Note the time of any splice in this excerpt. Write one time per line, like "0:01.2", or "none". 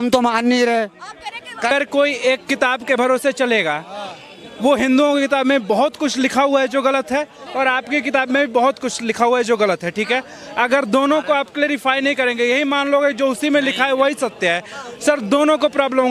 0:01.7